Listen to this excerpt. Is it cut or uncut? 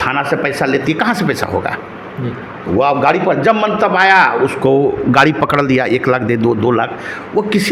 uncut